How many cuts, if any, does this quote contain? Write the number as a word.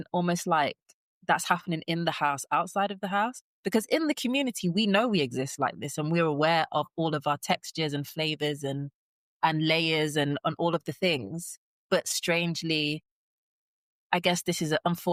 zero